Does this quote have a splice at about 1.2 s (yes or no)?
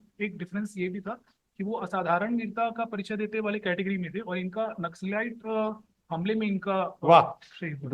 no